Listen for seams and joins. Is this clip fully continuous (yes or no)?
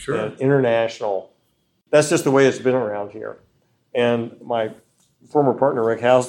no